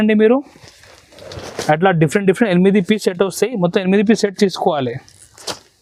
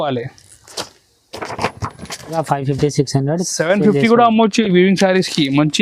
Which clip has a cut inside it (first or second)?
second